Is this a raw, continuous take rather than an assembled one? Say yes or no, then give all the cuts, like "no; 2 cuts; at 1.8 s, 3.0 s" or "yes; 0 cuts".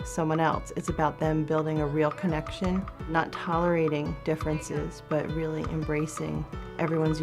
no; 1 cut; at 3.0 s